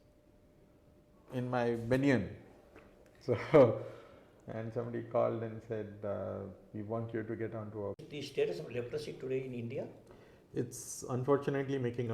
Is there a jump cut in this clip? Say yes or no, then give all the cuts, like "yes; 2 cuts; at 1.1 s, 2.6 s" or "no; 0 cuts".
yes; 1 cut; at 8.0 s